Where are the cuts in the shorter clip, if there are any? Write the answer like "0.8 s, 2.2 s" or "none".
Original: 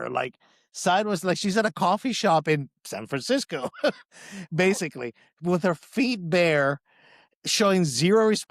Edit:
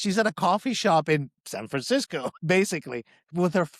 2.3 s